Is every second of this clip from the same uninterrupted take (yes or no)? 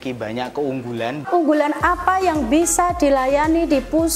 no